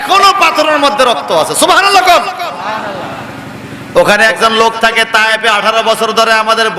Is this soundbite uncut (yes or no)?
yes